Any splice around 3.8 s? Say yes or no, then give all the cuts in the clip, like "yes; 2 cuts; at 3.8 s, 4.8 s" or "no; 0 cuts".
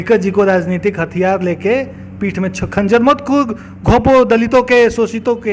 no; 0 cuts